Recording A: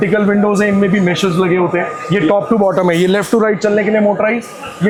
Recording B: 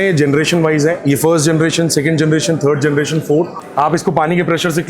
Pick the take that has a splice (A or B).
B